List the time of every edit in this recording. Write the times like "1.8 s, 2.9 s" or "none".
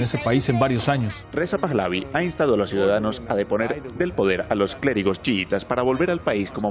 1.2 s